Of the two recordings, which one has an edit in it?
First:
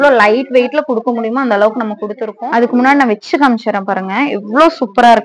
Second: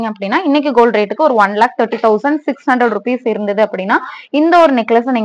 first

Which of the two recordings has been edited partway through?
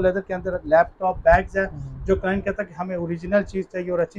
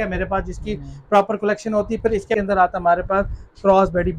second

